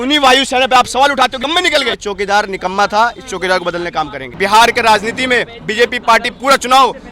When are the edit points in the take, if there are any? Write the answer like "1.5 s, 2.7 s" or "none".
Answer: 1.5 s, 4.2 s